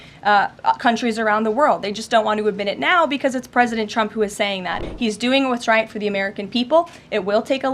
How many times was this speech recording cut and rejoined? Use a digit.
1